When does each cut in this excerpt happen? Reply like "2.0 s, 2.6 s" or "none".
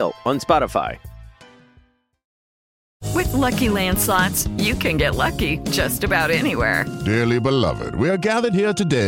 2.8 s